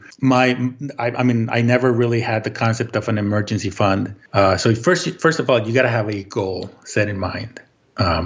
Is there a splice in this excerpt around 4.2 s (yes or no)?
yes